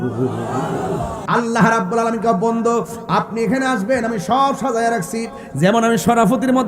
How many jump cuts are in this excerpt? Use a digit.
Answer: 1